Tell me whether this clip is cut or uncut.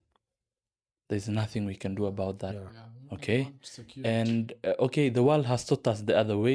uncut